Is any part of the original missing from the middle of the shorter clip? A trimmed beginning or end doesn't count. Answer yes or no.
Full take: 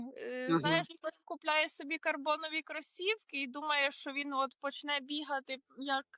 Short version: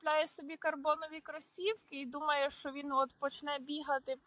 no